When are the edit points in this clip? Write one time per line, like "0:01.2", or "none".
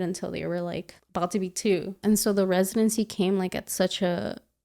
0:01.0
0:02.0